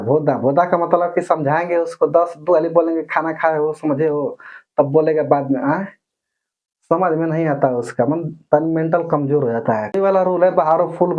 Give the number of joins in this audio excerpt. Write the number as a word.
one